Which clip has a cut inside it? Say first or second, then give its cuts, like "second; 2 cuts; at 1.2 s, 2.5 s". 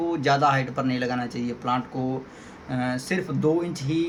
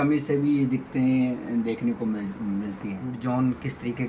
second; 1 cut; at 3.1 s